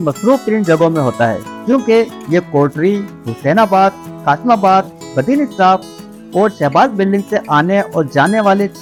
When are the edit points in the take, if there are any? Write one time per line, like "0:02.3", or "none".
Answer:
none